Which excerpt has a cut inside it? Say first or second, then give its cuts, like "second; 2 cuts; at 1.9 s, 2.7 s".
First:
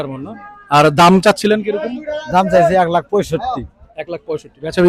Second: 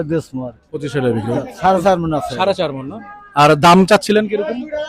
second; 1 cut; at 1.5 s